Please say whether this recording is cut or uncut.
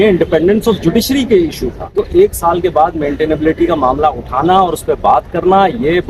cut